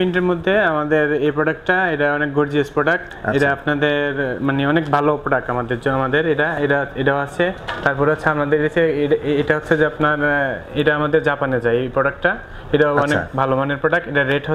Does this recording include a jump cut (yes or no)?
no